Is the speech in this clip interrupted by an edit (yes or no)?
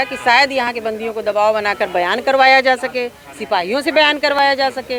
no